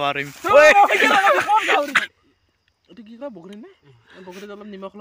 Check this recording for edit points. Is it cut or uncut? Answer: cut